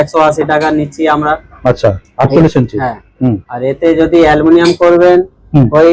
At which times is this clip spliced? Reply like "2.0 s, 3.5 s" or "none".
none

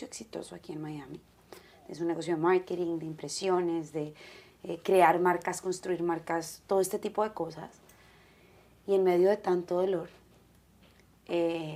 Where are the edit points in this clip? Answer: none

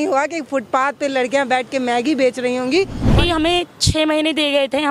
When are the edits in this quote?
3.0 s

